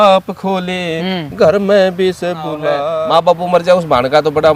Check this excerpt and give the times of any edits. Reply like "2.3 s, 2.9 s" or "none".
2.9 s

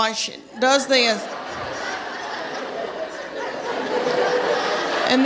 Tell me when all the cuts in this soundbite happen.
none

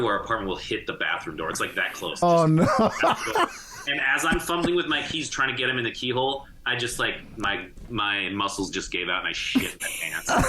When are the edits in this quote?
2.2 s

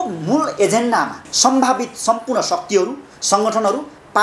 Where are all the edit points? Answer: 1.3 s

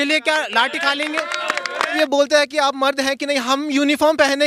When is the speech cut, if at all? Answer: 2.0 s

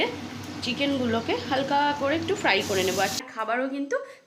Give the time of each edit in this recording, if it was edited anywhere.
3.2 s

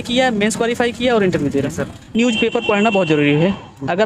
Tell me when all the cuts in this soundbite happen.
2.2 s

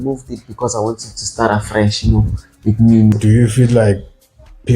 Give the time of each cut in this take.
3.1 s

